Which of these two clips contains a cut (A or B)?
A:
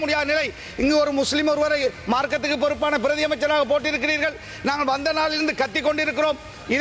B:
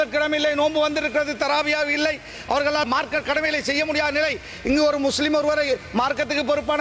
B